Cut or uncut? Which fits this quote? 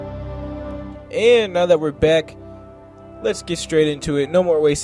cut